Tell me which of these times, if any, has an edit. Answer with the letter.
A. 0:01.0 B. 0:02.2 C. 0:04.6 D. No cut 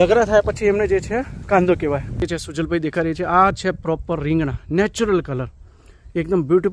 B